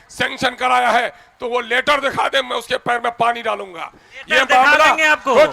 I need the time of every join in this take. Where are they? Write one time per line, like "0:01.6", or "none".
none